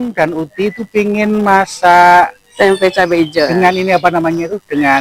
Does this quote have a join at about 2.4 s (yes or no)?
yes